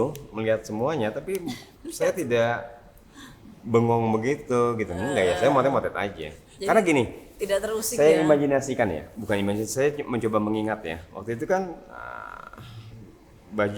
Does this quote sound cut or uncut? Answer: uncut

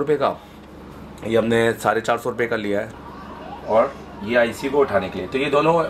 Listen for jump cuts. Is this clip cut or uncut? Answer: cut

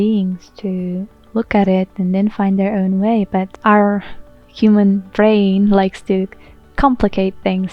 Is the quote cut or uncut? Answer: cut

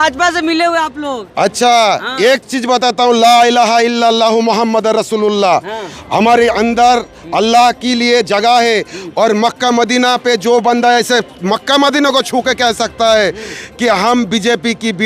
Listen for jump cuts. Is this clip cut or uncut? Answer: uncut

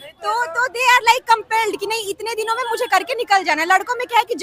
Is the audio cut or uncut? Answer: uncut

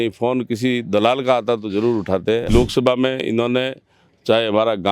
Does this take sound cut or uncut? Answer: cut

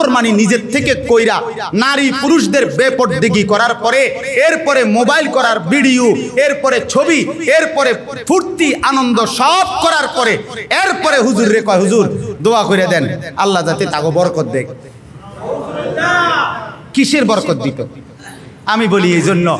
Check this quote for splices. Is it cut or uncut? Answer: uncut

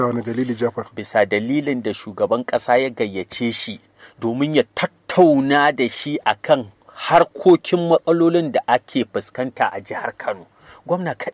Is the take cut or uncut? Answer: uncut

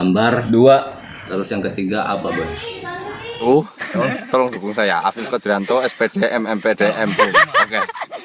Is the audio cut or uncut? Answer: cut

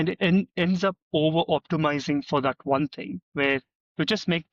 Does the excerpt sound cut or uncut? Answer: uncut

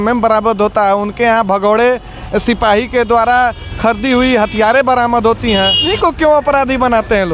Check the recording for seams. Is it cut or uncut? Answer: cut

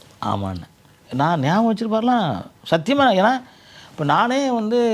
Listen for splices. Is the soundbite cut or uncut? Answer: cut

